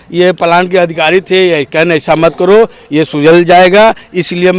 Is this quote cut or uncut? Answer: uncut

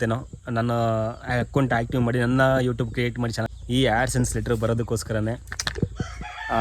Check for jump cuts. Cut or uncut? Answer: cut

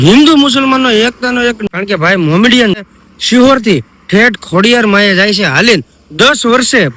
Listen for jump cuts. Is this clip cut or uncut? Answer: cut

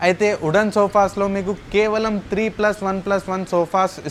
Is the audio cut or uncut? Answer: uncut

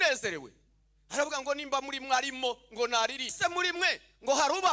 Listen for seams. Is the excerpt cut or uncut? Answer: cut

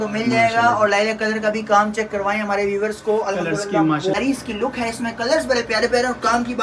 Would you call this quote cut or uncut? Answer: cut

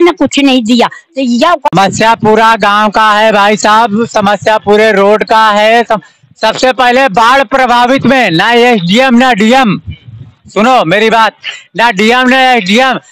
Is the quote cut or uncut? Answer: cut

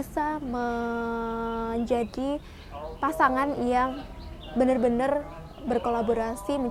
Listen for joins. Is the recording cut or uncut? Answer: uncut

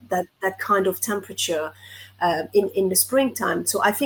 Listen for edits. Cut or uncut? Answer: uncut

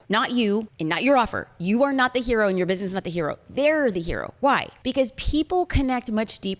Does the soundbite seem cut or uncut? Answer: uncut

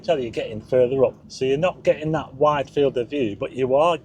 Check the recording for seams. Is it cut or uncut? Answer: cut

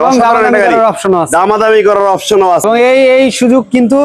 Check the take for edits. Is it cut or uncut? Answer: cut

